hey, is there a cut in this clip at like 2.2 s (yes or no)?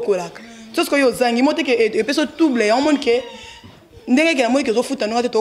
no